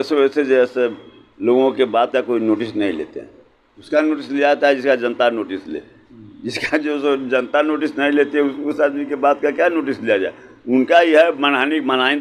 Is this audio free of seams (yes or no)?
yes